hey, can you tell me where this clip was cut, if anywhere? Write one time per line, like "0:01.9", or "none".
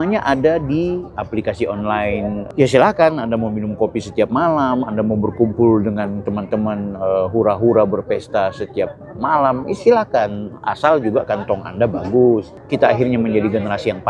0:02.4
0:12.6